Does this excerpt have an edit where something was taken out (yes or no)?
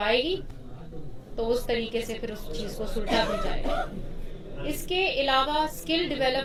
no